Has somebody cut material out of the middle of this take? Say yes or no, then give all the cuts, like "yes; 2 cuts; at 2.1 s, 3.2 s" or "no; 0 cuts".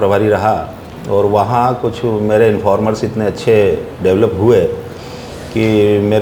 no; 0 cuts